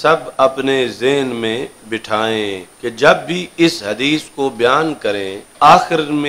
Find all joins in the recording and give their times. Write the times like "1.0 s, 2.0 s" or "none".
2.7 s, 5.4 s